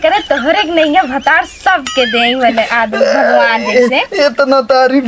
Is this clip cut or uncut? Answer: uncut